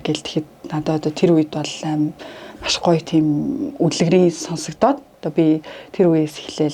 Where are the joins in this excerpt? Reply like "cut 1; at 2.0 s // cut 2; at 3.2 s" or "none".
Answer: none